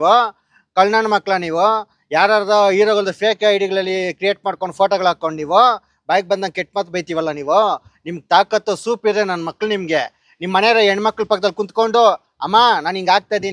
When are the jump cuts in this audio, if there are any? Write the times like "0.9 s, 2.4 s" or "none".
none